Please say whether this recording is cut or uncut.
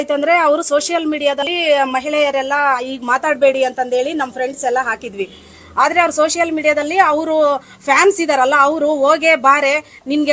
cut